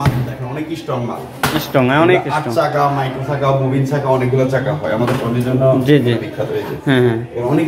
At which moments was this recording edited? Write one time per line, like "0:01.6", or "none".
none